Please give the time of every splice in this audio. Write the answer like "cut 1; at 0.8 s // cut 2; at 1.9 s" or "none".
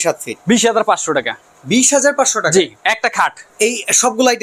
cut 1; at 3.4 s

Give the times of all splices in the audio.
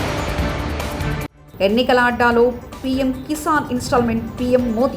cut 1; at 1.3 s

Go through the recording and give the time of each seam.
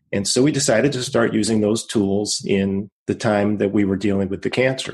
cut 1; at 2.9 s

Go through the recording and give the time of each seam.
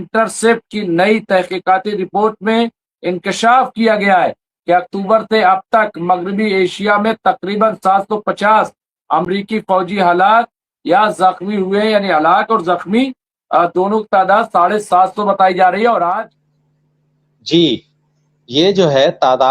cut 1; at 16.2 s

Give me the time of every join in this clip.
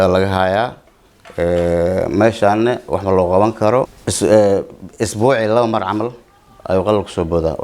cut 1; at 4.0 s

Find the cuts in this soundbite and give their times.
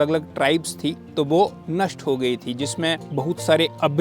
cut 1; at 1.6 s // cut 2; at 3.0 s

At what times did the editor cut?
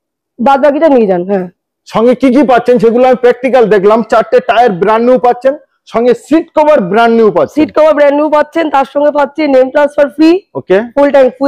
none

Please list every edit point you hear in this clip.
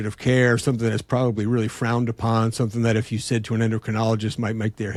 none

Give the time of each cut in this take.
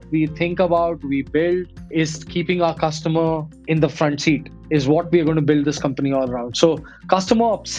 cut 1; at 4.5 s

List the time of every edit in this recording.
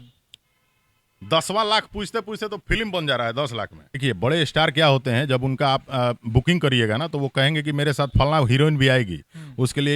cut 1; at 4.0 s

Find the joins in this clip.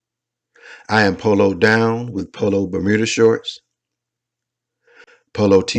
cut 1; at 3.1 s

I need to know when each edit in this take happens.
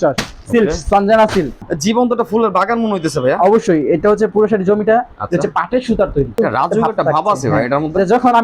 cut 1; at 1.6 s // cut 2; at 6.3 s

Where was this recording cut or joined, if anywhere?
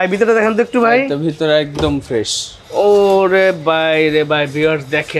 none

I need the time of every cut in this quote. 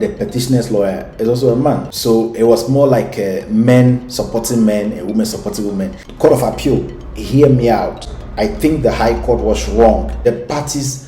cut 1; at 6.0 s // cut 2; at 10.1 s

